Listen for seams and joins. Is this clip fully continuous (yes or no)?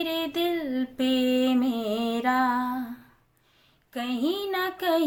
yes